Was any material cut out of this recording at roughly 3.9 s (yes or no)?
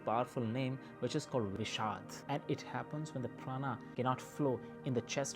yes